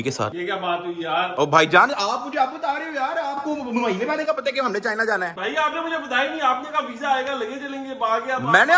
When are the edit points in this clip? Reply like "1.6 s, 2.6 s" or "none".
none